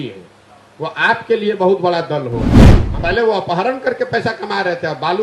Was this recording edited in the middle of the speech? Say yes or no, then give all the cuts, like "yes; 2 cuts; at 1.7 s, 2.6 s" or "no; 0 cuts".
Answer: yes; 1 cut; at 2.8 s